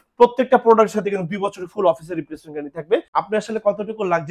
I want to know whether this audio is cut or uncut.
cut